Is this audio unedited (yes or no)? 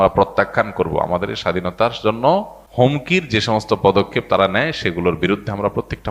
no